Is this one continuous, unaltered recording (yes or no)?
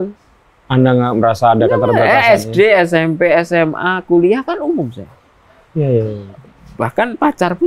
yes